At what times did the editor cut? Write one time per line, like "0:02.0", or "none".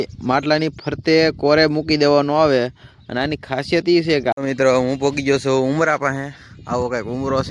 0:04.3